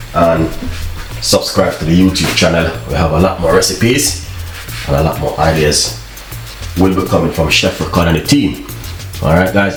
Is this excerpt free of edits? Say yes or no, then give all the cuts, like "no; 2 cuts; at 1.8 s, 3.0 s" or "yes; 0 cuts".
yes; 0 cuts